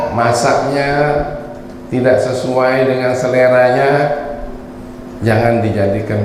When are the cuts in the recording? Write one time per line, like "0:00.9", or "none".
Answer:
none